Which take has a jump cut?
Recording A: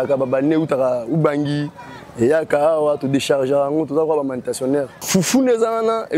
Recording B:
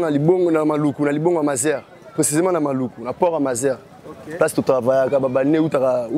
A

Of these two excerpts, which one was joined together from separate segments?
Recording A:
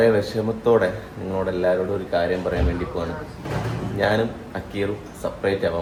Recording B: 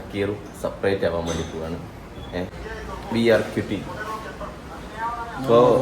B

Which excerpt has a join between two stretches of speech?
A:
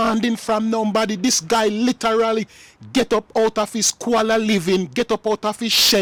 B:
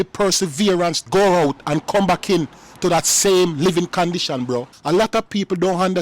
B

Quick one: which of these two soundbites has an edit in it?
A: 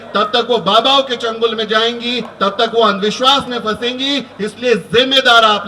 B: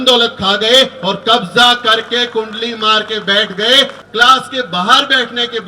B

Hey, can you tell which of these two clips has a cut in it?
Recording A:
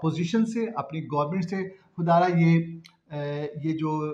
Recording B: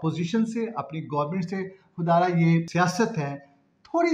B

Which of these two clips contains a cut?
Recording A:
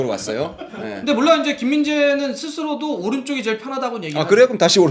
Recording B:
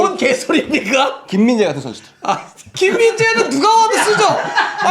B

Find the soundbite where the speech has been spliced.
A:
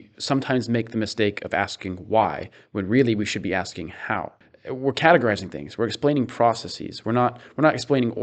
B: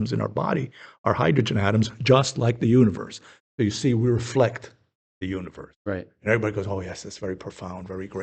A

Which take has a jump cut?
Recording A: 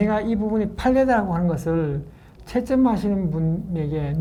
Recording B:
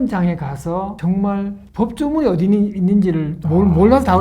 B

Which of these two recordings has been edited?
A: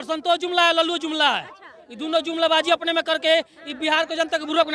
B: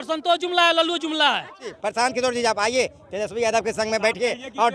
B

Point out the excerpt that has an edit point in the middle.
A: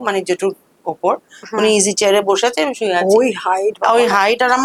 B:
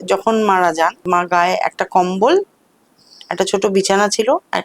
B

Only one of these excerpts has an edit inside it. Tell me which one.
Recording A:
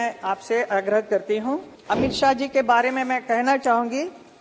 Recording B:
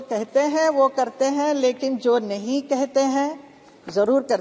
A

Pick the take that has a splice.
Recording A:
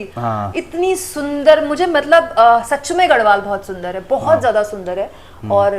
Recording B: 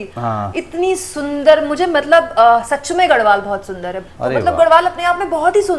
B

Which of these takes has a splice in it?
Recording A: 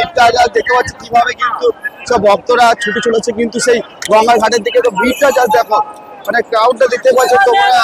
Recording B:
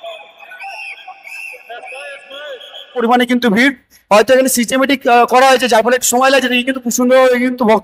B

